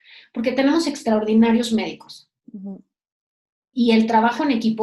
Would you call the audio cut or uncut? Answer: uncut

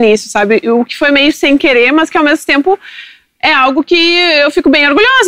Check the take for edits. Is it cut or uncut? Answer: uncut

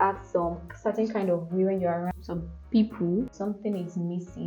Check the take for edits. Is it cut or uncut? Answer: cut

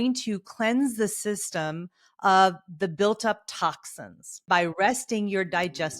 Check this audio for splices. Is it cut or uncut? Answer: cut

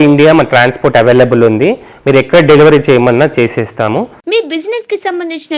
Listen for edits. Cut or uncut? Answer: cut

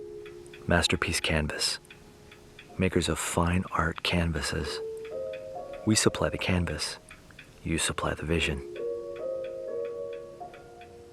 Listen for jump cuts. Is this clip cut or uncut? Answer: uncut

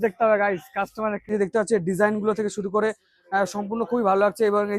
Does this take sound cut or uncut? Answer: cut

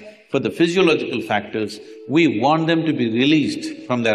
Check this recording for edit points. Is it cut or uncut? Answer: uncut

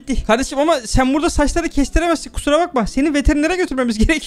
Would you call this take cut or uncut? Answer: uncut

